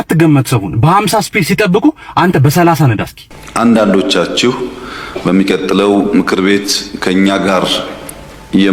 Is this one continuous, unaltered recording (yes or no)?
yes